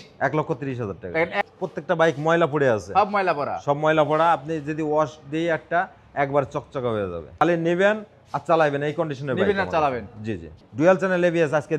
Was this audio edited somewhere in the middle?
yes; 3 cuts; at 1.4 s, 7.4 s, 10.6 s

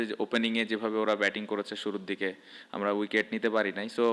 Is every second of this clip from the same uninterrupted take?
yes; 0 cuts

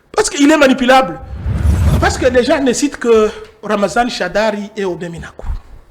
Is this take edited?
yes; 1 cut; at 1.8 s

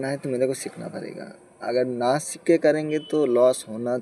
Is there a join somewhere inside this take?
no; 0 cuts

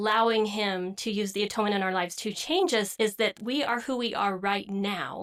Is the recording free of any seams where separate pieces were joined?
yes; 0 cuts

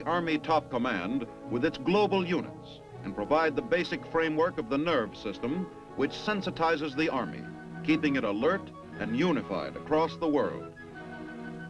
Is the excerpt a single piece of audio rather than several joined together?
no; 1 cut; at 5.0 s

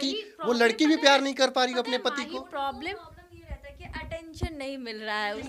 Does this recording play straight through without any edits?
yes; 0 cuts

